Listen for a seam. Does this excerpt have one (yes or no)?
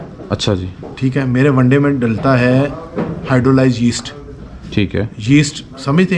no